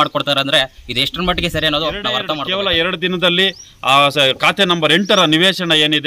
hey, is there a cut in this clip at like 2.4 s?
yes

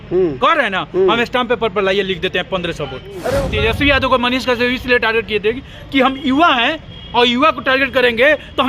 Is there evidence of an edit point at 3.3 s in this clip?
yes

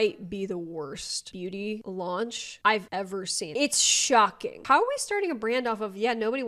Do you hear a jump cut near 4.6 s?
yes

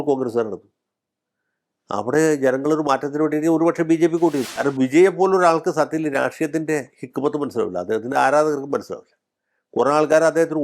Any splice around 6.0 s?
no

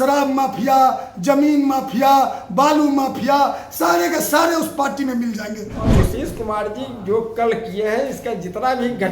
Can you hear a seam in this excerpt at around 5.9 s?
yes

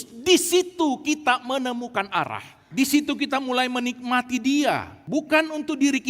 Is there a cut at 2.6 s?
yes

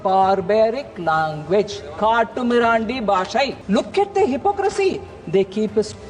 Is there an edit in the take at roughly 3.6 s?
yes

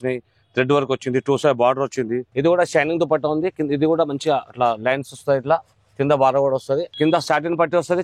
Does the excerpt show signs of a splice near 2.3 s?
yes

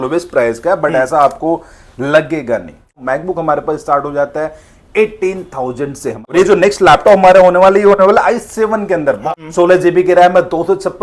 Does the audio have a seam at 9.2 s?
yes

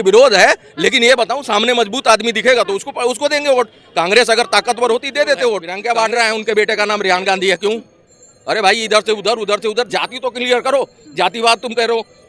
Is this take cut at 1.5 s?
no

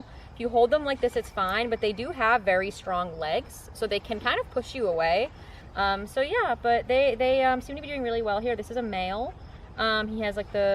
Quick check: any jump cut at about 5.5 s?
yes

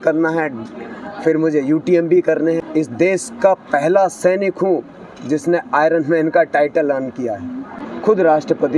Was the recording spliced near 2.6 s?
yes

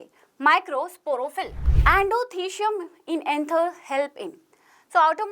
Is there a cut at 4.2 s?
no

